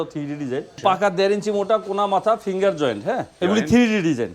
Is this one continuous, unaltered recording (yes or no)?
no